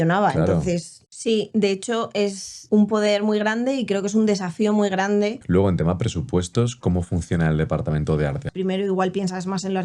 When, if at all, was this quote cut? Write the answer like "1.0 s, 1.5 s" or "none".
1.0 s, 5.4 s, 8.5 s